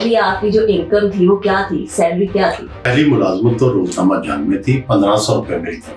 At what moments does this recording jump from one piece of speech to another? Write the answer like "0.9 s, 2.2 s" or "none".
2.8 s